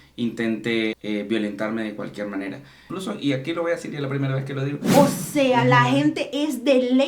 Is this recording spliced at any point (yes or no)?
yes